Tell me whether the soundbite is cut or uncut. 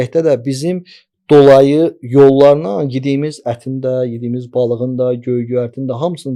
uncut